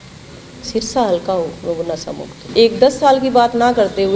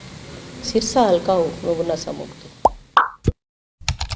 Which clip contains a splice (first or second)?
first